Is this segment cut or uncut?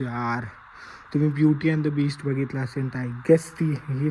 uncut